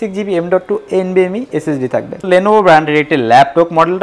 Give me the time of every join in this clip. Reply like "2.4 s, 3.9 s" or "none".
2.2 s